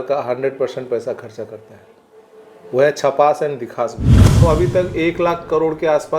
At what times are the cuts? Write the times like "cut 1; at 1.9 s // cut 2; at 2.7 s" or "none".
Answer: cut 1; at 4.4 s